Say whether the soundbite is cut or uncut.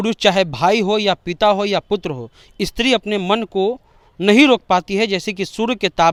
uncut